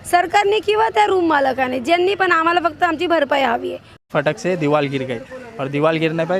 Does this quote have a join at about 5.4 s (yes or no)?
no